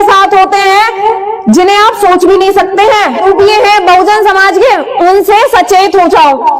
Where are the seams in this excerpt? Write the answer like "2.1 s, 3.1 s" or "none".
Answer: 3.2 s